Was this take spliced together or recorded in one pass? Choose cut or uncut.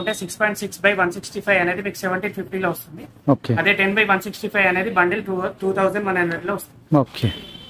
uncut